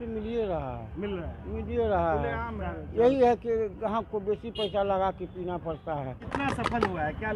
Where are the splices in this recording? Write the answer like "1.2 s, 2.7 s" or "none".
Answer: 6.3 s